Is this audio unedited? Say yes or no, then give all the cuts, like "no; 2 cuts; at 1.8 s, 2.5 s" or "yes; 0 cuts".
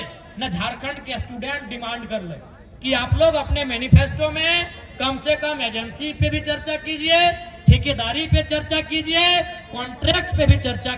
yes; 0 cuts